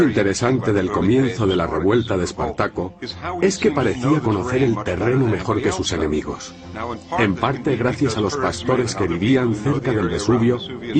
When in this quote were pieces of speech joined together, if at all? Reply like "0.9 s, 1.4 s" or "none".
none